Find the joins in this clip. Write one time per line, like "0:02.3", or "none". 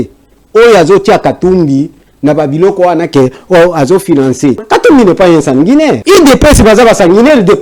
0:04.6
0:06.0